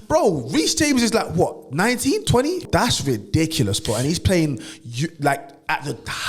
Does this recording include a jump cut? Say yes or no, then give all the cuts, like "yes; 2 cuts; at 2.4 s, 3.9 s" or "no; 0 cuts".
yes; 1 cut; at 2.6 s